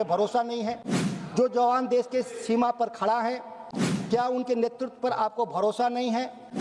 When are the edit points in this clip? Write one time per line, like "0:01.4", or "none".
none